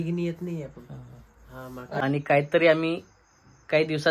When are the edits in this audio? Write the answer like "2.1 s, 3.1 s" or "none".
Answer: 2.0 s